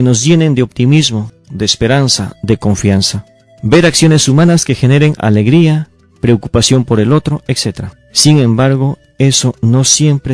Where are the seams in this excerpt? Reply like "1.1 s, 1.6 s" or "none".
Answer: 4.4 s